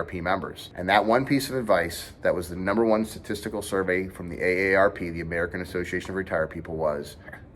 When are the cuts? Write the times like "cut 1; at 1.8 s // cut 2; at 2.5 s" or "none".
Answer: none